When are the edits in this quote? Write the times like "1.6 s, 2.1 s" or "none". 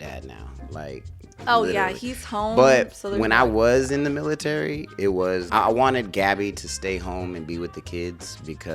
5.5 s